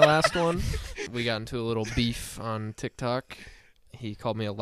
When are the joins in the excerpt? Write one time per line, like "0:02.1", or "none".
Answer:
0:01.0